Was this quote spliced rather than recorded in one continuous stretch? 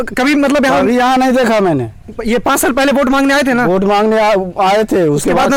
no; 0 cuts

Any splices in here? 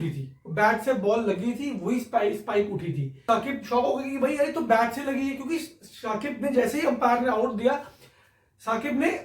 yes; 1 cut; at 3.2 s

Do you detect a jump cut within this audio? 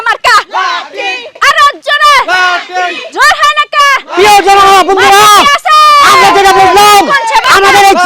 no; 0 cuts

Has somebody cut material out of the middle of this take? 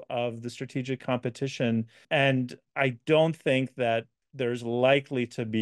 yes; 1 cut; at 2.0 s

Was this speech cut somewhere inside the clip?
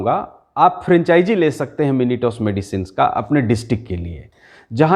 no; 0 cuts

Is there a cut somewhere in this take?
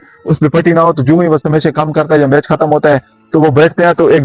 no; 0 cuts

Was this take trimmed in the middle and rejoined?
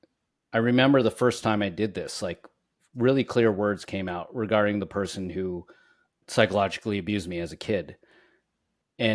yes; 1 cut; at 6.2 s

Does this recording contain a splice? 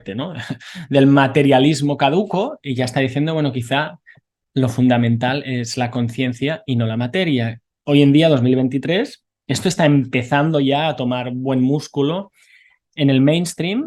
no; 0 cuts

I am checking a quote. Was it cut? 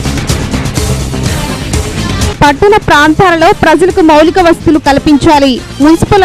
yes; 1 cut; at 1.0 s

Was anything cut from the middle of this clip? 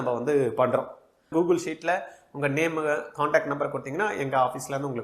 yes; 1 cut; at 1.3 s

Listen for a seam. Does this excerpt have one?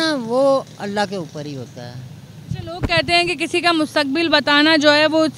no; 0 cuts

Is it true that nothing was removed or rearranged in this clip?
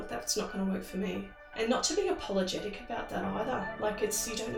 no; 1 cut; at 1.4 s

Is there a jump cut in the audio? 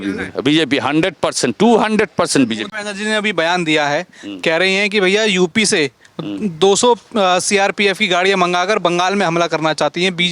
yes; 1 cut; at 2.6 s

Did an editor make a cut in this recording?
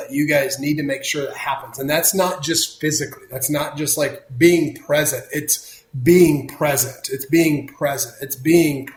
no; 0 cuts

